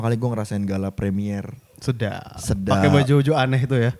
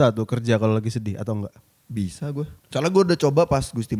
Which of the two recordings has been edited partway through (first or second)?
second